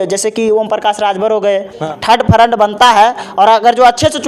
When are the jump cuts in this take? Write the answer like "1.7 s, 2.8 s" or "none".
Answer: 1.8 s